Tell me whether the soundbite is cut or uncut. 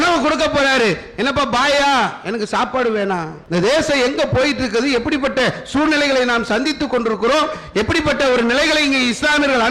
cut